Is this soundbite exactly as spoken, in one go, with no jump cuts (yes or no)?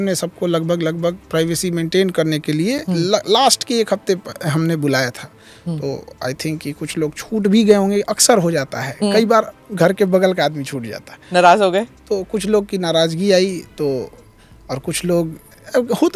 yes